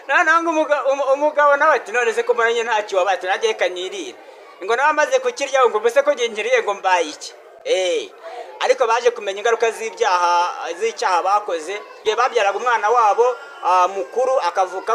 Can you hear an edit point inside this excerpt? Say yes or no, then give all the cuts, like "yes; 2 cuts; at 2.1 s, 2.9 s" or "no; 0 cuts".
no; 0 cuts